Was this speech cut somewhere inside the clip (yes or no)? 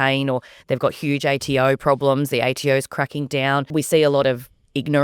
yes